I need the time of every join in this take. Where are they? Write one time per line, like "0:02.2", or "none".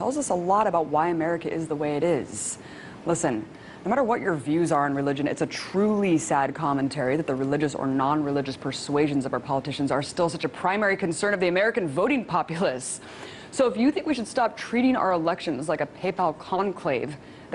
0:07.1